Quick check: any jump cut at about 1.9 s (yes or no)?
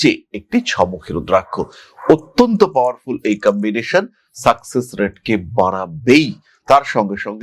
no